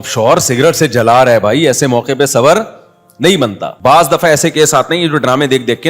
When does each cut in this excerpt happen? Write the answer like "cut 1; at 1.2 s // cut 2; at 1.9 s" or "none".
cut 1; at 3.7 s